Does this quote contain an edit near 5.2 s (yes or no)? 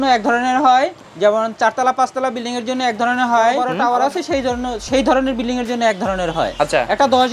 no